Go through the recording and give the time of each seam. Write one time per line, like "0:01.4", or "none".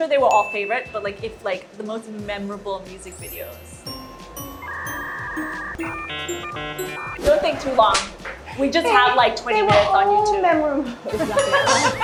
none

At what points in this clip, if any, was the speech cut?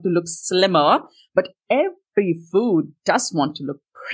none

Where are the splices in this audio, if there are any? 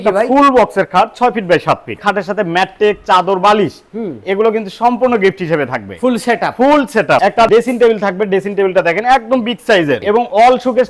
0:01.9
0:10.0

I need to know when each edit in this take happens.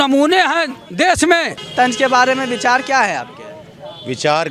0:01.6

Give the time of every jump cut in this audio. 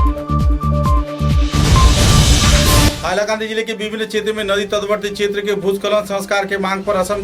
0:02.9

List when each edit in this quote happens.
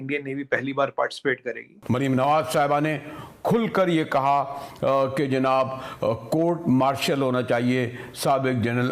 0:01.8

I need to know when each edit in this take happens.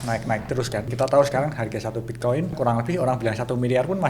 0:00.9
0:02.5

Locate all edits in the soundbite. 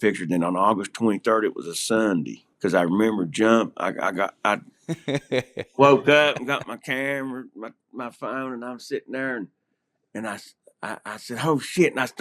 0:02.4

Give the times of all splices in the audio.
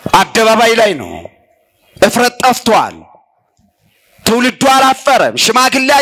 none

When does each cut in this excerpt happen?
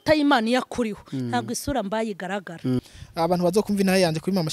0:02.8

